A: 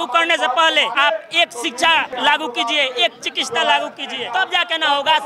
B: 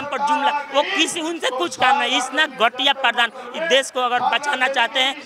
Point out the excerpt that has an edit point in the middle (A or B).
A